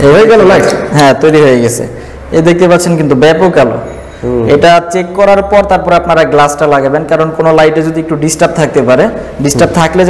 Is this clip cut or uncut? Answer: uncut